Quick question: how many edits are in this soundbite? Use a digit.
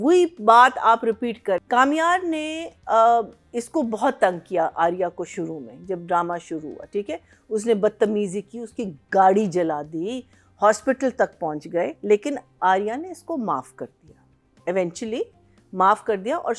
1